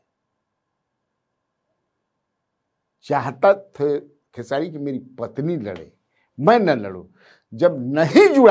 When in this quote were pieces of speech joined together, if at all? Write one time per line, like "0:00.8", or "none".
none